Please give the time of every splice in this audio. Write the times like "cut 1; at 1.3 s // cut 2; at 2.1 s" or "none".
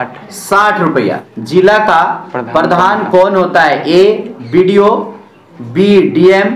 cut 1; at 1.3 s